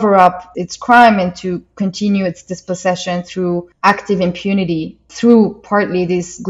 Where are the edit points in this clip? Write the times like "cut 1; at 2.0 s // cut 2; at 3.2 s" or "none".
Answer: none